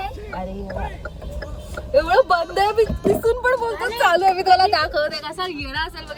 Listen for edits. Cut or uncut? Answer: uncut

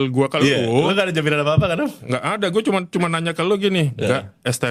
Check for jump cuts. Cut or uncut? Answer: uncut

